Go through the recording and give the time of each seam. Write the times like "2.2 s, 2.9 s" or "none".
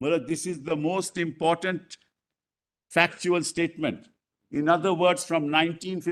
none